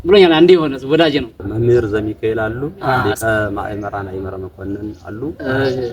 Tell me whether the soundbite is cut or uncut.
cut